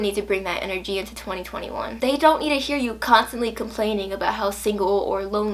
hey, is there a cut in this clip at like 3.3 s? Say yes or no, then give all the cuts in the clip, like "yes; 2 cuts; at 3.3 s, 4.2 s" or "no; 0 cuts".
no; 1 cut; at 1.8 s